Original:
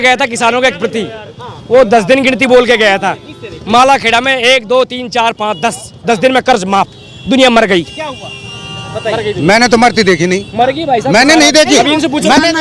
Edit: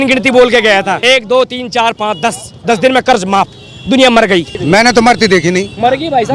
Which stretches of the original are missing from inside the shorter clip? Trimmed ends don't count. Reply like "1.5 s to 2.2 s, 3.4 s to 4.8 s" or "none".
3.2 s to 4.4 s, 8.0 s to 9.3 s